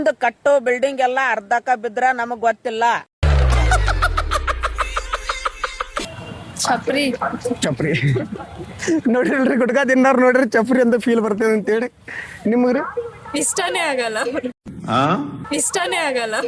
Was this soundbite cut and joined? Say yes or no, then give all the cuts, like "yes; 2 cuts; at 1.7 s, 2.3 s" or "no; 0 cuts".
no; 0 cuts